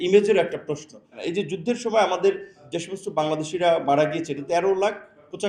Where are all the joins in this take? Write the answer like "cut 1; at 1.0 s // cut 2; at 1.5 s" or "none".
cut 1; at 1.2 s // cut 2; at 2.7 s // cut 3; at 4.4 s